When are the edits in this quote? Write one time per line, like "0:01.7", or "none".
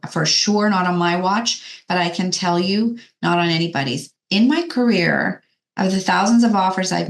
0:04.1